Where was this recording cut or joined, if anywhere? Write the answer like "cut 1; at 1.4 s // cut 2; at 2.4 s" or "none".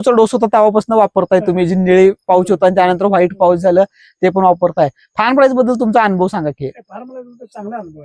none

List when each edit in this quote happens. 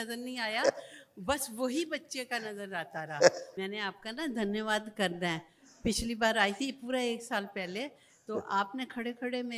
cut 1; at 3.5 s

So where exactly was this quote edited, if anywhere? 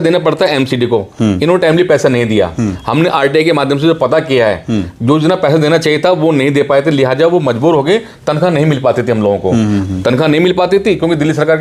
none

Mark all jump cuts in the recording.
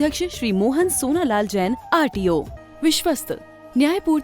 cut 1; at 2.6 s

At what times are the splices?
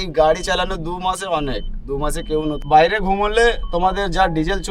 cut 1; at 2.6 s

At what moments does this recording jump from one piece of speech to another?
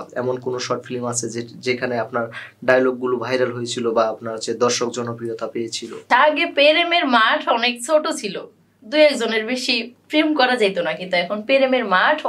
cut 1; at 6.0 s

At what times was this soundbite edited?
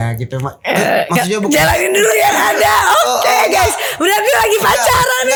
none

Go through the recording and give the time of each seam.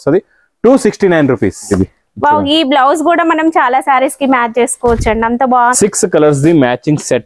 cut 1; at 1.7 s // cut 2; at 5.7 s

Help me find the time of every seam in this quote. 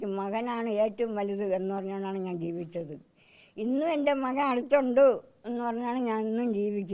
none

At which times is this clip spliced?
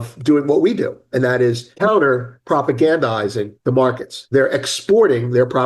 cut 1; at 1.7 s // cut 2; at 3.8 s

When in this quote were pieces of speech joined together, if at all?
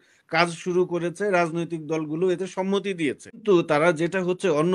cut 1; at 3.4 s

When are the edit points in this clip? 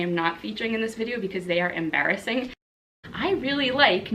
cut 1; at 2.8 s

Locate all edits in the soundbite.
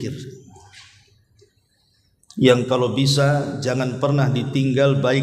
none

